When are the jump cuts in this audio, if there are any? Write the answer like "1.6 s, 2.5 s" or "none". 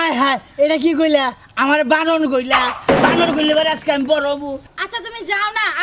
4.7 s